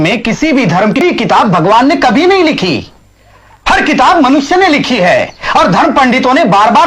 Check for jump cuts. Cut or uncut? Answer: cut